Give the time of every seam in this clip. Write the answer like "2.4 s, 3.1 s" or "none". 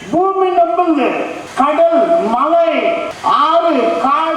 1.4 s, 3.1 s